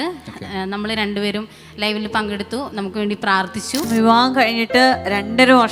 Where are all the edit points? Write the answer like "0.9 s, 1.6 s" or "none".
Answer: 3.9 s